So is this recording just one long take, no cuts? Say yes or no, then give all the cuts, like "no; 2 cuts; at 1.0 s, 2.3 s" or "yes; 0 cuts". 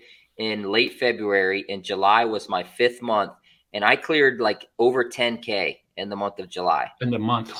yes; 0 cuts